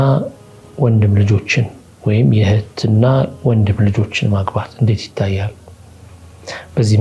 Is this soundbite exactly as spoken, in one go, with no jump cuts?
yes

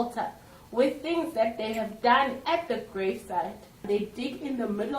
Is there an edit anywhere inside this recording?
yes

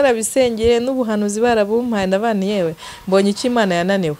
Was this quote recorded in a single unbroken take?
yes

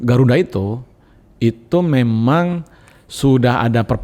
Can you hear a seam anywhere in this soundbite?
no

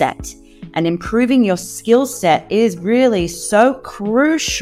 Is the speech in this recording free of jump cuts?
yes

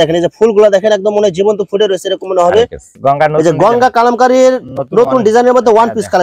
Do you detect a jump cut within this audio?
yes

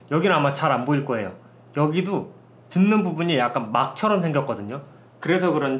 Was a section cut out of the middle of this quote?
no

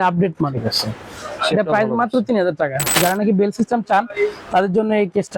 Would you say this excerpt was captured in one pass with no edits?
no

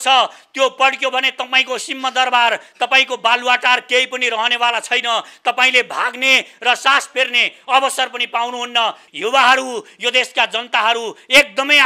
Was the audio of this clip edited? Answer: yes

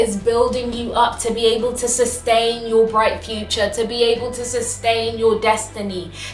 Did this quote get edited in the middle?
no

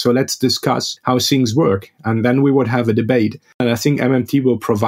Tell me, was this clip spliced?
yes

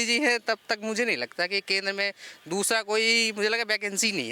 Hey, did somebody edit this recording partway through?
no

